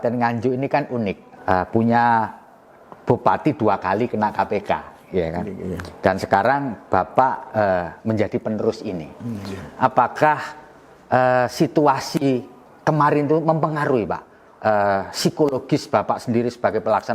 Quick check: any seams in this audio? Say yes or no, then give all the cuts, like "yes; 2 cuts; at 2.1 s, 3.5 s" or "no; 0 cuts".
yes; 1 cut; at 1.3 s